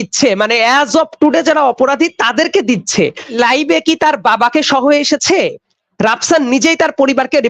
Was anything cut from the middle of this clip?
yes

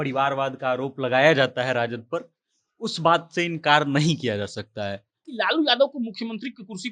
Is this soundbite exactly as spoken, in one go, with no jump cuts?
no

